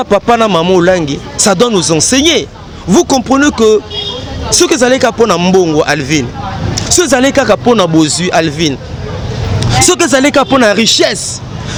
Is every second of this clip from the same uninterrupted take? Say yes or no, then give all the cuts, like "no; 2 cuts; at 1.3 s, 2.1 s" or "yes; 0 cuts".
yes; 0 cuts